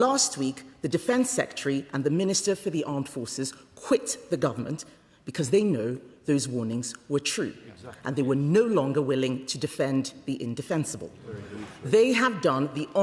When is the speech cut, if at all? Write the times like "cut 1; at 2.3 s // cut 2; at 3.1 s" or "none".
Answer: none